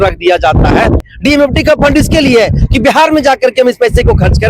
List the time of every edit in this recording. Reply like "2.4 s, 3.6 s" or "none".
1.1 s